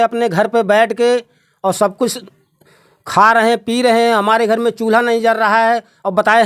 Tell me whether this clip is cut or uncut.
uncut